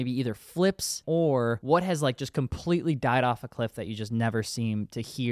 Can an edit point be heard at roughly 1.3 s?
yes; 1 cut; at 1.3 s

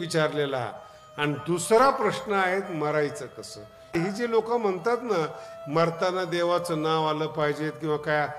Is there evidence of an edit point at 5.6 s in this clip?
no; 1 cut; at 3.9 s

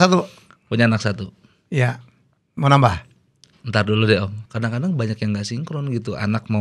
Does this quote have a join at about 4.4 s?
yes; 1 cut; at 4.4 s

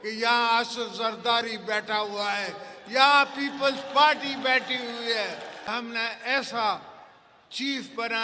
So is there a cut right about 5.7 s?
yes; 1 cut; at 5.7 s

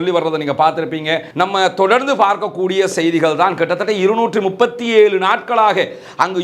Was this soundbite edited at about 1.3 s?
yes; 1 cut; at 1.3 s

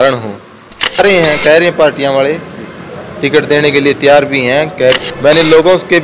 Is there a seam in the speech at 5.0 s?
yes; 2 cuts; at 1.0 s, 5.0 s

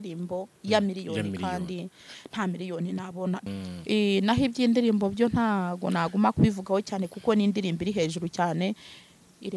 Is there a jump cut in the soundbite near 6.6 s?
no; 1 cut; at 3.5 s

